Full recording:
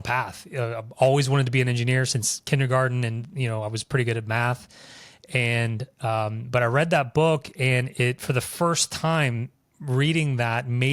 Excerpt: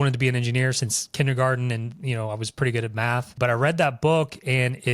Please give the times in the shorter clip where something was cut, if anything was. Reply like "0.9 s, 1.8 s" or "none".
3.3 s